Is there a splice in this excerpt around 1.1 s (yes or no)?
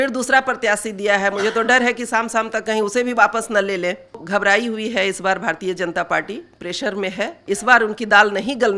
no